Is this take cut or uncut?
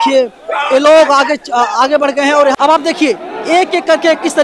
cut